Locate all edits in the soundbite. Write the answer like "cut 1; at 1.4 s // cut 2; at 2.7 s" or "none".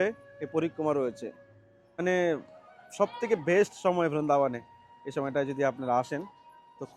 cut 1; at 2.0 s